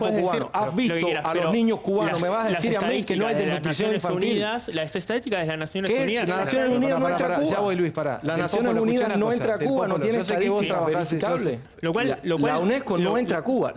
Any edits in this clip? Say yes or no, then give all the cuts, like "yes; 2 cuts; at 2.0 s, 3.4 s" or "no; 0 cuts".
yes; 1 cut; at 11.7 s